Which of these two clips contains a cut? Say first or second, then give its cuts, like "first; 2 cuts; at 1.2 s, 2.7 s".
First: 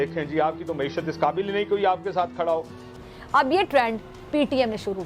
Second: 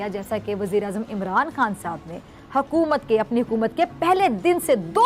first; 1 cut; at 2.8 s